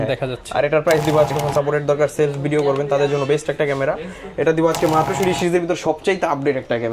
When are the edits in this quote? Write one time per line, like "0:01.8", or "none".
0:01.3
0:05.1